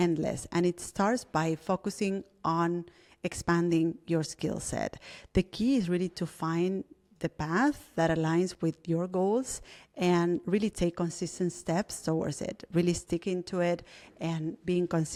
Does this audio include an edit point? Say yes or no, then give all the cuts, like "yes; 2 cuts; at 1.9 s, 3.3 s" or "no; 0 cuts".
no; 0 cuts